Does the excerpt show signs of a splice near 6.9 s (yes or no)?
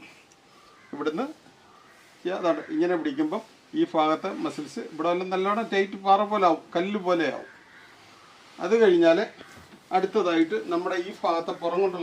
yes